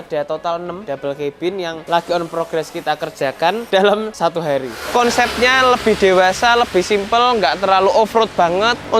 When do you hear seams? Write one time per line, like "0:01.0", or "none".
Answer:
0:00.8
0:01.8
0:03.6
0:04.5